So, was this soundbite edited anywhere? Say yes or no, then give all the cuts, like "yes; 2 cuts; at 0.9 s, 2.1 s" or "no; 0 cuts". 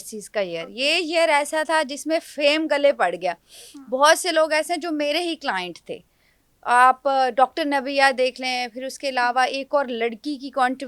no; 0 cuts